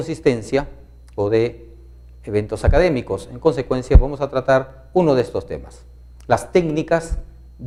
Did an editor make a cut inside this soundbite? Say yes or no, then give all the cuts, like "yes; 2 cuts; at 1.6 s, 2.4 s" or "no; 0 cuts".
no; 0 cuts